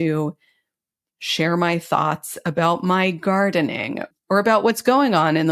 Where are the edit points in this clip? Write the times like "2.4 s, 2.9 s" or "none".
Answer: 4.1 s